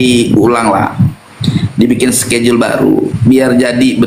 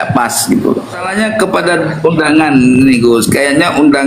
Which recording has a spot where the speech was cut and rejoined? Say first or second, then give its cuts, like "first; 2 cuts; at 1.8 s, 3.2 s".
second; 1 cut; at 1.0 s